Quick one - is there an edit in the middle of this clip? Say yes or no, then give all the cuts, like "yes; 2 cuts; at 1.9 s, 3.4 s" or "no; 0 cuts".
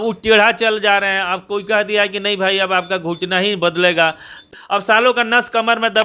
yes; 1 cut; at 4.5 s